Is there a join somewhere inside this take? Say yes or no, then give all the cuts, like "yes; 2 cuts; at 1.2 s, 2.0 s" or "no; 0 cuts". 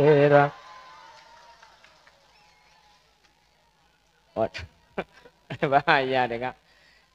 no; 0 cuts